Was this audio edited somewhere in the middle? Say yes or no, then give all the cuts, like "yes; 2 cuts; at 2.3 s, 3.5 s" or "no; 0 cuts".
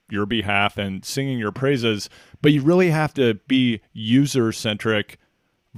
no; 0 cuts